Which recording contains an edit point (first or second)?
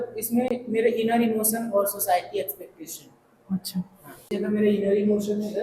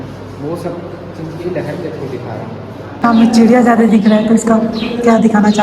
second